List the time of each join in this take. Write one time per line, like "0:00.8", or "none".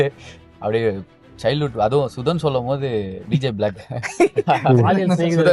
none